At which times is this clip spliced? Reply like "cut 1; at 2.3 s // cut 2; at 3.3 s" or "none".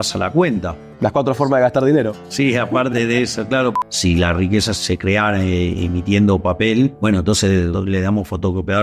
cut 1; at 3.8 s // cut 2; at 4.7 s // cut 3; at 7.4 s